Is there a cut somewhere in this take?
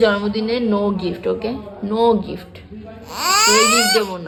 no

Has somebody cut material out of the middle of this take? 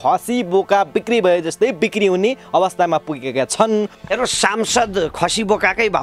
yes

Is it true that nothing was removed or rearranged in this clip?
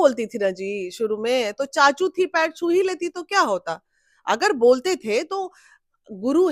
yes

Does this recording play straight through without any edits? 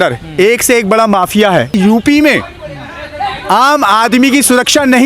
no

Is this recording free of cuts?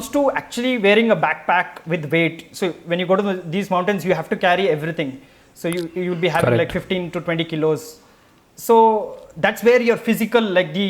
yes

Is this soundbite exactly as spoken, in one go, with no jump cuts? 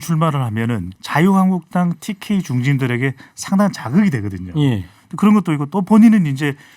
no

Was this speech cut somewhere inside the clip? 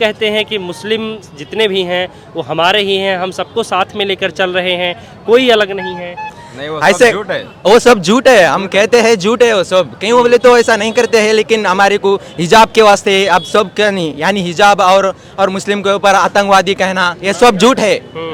no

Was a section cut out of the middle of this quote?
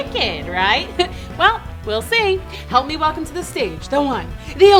no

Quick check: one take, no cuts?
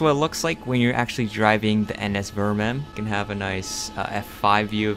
no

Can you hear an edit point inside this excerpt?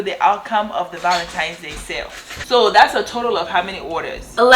yes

